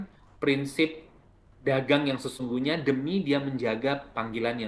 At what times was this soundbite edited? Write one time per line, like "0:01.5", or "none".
none